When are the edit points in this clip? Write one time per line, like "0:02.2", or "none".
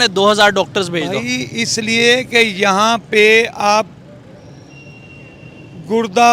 none